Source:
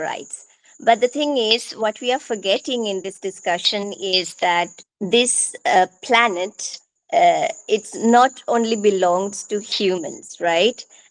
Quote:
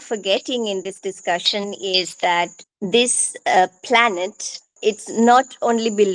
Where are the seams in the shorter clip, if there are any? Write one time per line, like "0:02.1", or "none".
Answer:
0:04.7